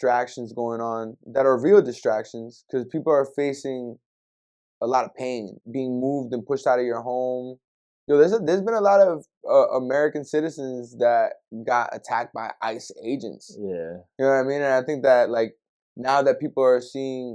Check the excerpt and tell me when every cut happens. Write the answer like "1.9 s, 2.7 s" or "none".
5.6 s